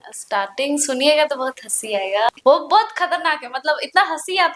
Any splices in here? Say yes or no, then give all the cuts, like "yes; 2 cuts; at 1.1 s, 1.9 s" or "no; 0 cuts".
yes; 1 cut; at 2.3 s